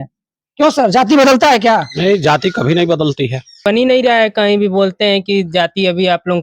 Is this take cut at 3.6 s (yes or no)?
yes